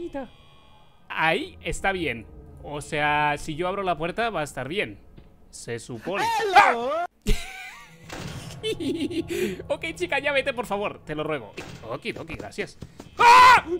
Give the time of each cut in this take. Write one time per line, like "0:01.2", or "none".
0:11.6